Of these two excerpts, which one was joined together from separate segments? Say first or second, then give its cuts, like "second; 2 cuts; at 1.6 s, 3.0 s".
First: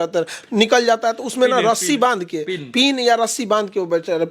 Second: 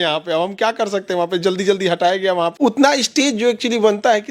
second; 1 cut; at 2.5 s